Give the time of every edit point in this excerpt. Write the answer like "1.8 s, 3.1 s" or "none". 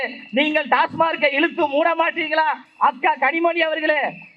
none